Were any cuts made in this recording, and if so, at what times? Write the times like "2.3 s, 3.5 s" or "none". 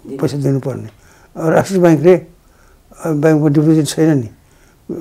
none